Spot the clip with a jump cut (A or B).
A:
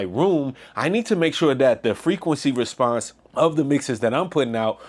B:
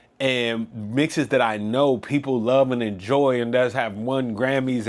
A